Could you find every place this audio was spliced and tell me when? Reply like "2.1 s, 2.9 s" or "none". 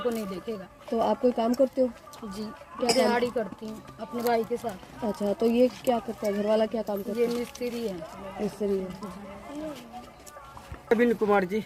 none

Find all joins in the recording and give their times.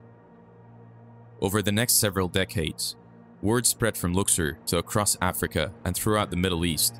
1.4 s

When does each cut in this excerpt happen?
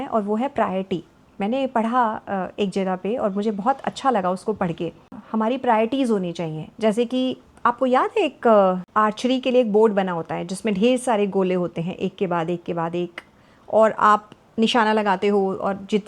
5.2 s, 7.5 s

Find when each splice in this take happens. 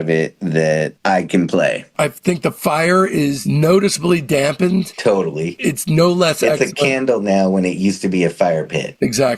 1.9 s, 3.4 s

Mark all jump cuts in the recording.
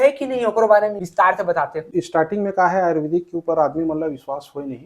1.9 s

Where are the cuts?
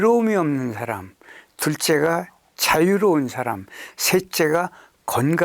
none

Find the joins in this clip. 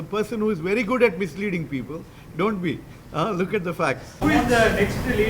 4.2 s

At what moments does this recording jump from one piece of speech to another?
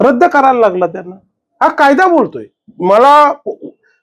none

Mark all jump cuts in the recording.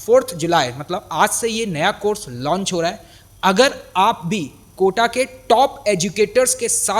none

